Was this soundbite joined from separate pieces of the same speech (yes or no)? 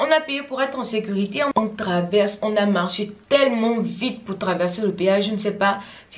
yes